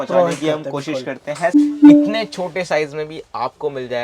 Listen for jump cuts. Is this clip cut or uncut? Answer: cut